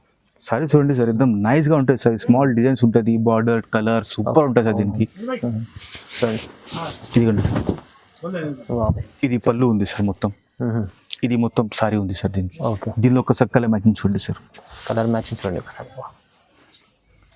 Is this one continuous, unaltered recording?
yes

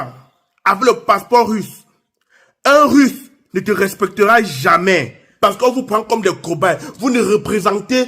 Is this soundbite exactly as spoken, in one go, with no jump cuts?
no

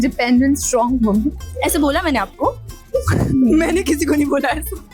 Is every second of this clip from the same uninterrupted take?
yes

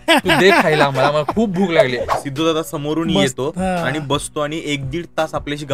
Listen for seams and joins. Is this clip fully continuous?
no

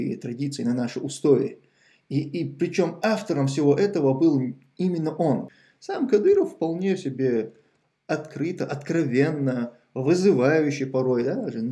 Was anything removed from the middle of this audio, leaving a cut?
yes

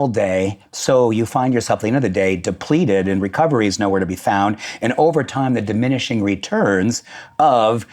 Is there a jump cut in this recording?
no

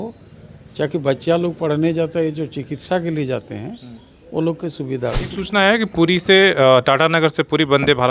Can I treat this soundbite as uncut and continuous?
no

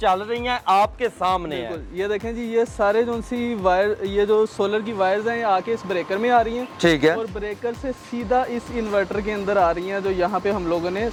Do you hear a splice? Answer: no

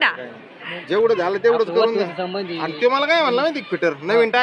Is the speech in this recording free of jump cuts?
yes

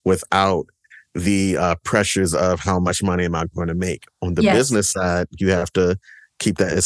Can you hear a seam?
no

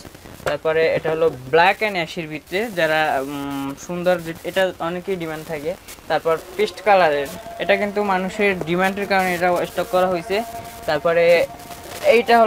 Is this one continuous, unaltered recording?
yes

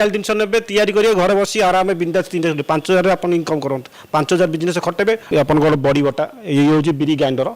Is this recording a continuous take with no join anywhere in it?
no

